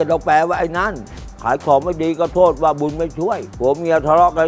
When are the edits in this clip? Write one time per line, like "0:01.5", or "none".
0:01.3
0:03.5

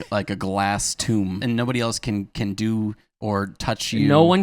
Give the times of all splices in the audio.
0:01.4

